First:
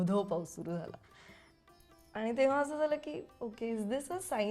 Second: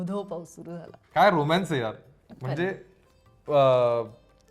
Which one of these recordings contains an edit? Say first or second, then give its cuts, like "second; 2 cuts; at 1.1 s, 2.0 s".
second; 1 cut; at 0.9 s